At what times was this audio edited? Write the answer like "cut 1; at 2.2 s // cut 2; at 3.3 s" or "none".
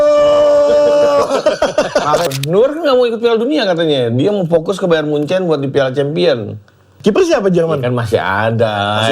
cut 1; at 2.3 s // cut 2; at 6.9 s